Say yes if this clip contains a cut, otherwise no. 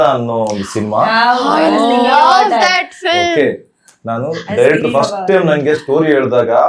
no